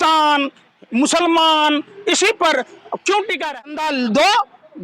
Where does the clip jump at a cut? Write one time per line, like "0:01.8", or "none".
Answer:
0:03.3